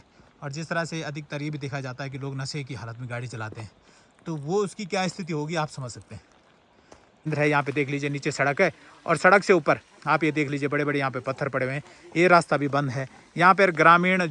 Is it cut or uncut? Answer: cut